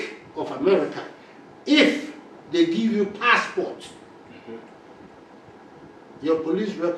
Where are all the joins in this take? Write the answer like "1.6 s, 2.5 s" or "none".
none